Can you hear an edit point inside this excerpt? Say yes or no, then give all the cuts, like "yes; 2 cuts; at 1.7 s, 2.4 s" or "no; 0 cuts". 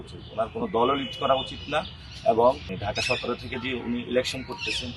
yes; 1 cut; at 2.7 s